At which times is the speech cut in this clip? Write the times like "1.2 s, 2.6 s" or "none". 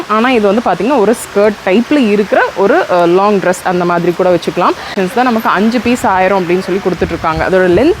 4.9 s